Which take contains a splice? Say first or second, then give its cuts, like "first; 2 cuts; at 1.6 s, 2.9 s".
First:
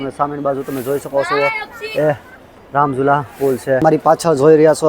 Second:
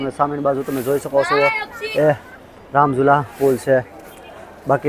first; 1 cut; at 3.8 s